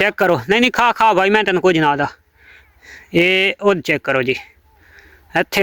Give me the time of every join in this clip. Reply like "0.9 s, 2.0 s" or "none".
none